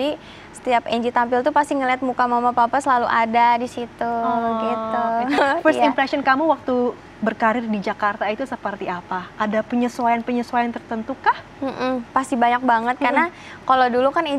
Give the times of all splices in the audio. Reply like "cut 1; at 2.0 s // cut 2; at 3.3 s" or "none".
cut 1; at 5.4 s